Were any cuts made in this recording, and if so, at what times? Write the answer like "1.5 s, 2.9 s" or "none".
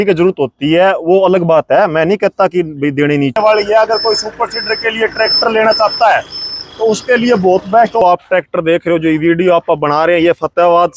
3.4 s, 8.0 s